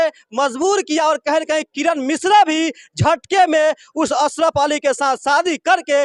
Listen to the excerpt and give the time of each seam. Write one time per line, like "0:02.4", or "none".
none

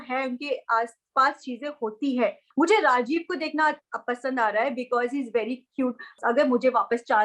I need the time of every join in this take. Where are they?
0:02.4
0:06.1

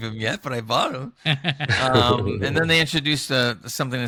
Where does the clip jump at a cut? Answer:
none

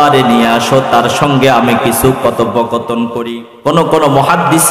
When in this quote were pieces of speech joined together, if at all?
0:03.2

